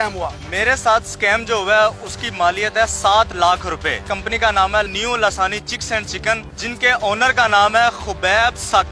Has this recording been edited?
no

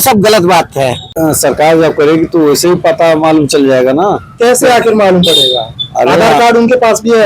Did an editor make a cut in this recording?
yes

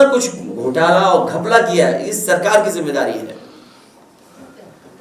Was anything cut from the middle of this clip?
no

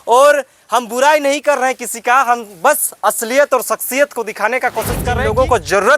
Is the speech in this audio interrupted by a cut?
yes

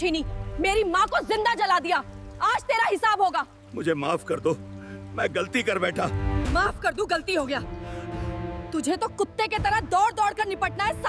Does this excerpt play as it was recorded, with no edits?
yes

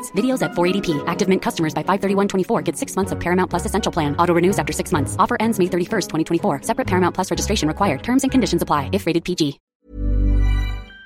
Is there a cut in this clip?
yes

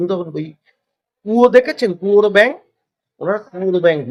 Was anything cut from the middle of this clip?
no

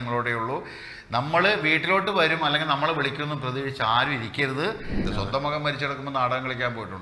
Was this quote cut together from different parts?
yes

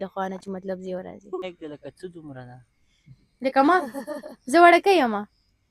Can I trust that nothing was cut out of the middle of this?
no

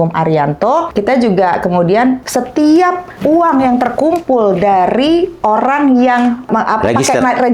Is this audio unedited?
no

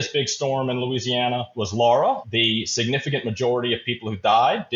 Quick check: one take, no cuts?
no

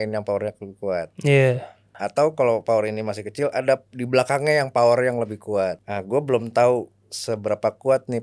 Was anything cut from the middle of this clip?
yes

